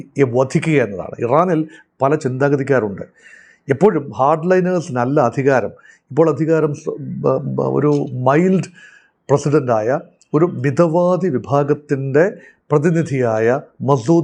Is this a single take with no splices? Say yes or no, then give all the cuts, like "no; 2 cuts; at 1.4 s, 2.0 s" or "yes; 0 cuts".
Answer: yes; 0 cuts